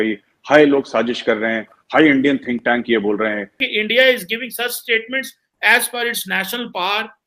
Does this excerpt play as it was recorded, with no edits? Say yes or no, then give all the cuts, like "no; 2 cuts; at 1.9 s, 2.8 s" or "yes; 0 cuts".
no; 2 cuts; at 1.7 s, 3.6 s